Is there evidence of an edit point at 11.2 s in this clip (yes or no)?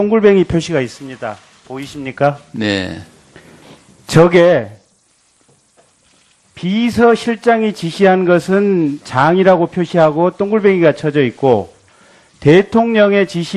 yes